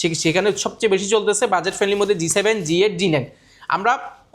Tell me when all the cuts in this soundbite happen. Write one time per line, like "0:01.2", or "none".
none